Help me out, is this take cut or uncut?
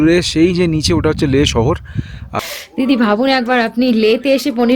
cut